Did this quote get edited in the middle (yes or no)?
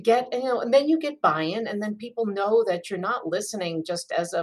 no